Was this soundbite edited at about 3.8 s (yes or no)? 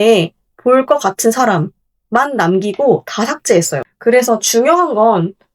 yes